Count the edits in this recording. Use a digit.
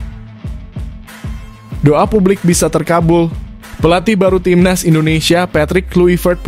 1